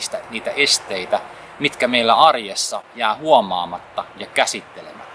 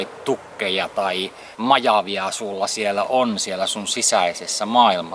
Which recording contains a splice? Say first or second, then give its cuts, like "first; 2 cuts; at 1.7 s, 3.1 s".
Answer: second; 1 cut; at 1.4 s